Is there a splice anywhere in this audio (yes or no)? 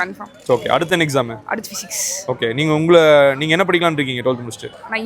no